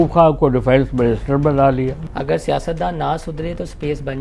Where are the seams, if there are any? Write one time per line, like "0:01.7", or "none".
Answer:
0:02.0